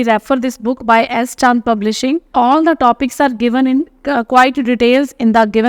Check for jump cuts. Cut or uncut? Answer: cut